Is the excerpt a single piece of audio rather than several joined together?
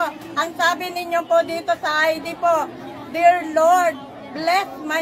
yes; 0 cuts

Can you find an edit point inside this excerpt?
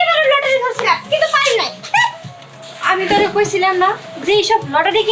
no; 0 cuts

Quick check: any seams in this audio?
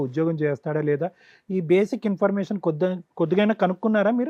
no; 0 cuts

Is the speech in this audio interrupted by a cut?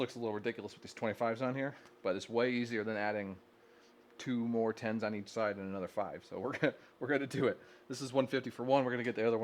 no; 0 cuts

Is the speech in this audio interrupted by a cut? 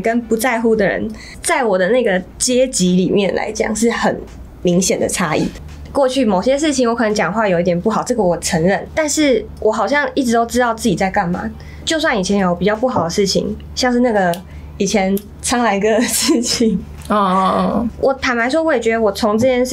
no; 0 cuts

